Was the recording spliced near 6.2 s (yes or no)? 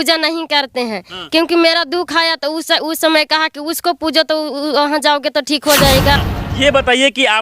yes